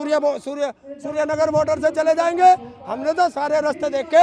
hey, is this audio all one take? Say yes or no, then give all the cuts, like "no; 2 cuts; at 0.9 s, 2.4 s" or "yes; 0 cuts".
yes; 0 cuts